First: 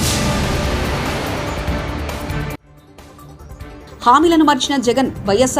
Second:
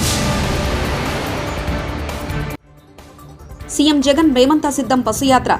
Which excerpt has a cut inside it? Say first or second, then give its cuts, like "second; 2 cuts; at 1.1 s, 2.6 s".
second; 1 cut; at 3.5 s